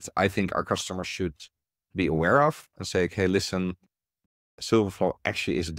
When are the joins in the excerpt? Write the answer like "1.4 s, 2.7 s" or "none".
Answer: none